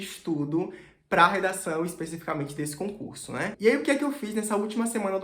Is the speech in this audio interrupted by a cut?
yes; 1 cut; at 3.5 s

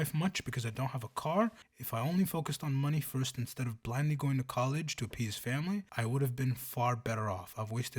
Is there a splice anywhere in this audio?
yes; 2 cuts; at 1.7 s, 5.9 s

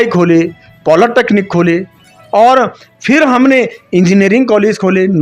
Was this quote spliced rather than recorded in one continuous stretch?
no; 0 cuts

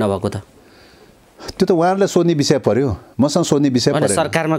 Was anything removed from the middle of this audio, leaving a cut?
no; 0 cuts

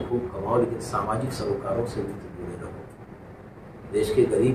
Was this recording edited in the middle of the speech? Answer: no; 0 cuts

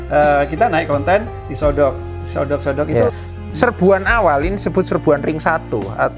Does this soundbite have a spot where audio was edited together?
yes; 1 cut; at 3.3 s

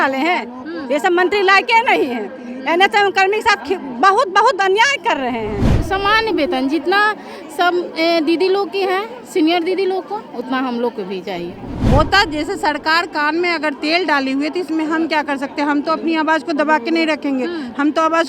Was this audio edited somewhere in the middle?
yes; 2 cuts; at 5.7 s, 11.7 s

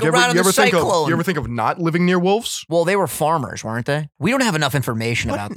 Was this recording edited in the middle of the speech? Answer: yes; 2 cuts; at 2.6 s, 4.1 s

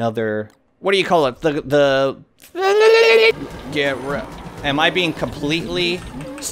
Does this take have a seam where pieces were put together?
yes; 1 cut; at 3.3 s

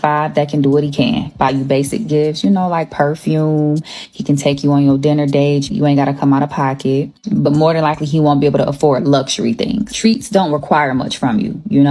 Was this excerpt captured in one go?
no; 1 cut; at 7.1 s

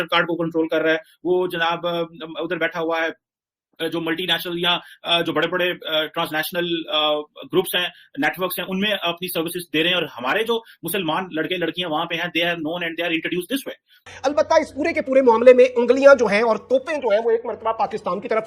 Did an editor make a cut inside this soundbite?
no; 0 cuts

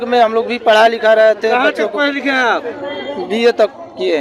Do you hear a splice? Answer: no; 0 cuts

